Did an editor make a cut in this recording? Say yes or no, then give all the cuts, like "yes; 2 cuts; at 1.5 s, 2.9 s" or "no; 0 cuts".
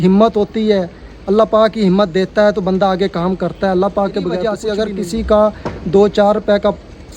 yes; 1 cut; at 4.5 s